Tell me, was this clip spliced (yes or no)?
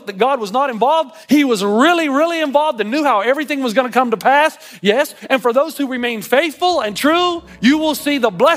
yes